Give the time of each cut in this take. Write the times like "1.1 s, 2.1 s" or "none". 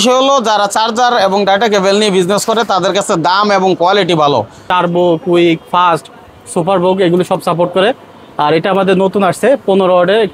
4.7 s